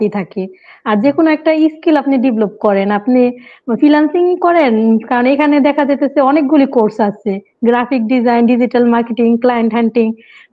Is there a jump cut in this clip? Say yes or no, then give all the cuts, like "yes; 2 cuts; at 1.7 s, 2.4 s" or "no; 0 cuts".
no; 0 cuts